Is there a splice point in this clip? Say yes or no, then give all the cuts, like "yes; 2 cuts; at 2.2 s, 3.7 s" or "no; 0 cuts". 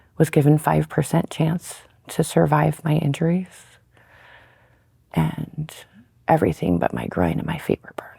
no; 0 cuts